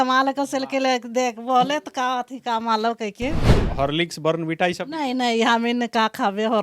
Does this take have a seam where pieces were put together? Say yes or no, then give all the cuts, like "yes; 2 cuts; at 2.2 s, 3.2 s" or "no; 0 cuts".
yes; 1 cut; at 3.6 s